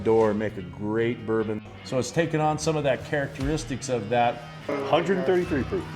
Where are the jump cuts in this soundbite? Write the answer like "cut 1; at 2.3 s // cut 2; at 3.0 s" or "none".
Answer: cut 1; at 1.6 s // cut 2; at 4.8 s